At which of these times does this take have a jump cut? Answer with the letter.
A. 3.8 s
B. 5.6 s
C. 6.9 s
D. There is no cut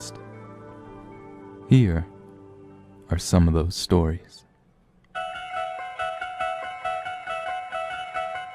A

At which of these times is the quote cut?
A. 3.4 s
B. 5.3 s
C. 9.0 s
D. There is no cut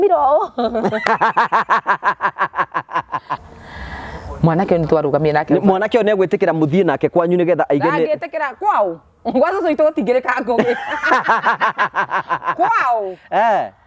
A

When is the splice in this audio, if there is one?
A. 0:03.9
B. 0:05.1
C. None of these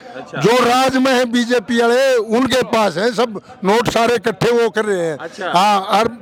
C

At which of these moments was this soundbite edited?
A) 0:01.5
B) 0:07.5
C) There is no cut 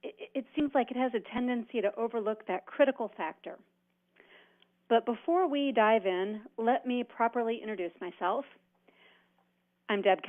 B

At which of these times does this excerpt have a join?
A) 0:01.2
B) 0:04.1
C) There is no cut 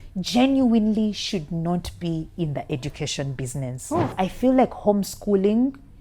B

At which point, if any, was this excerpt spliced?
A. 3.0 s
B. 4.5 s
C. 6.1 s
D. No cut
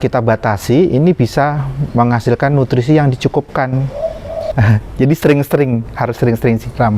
B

